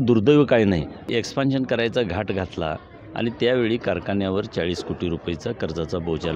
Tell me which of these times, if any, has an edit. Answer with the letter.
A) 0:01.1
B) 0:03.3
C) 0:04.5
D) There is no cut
A